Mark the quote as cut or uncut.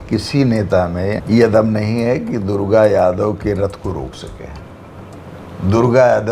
cut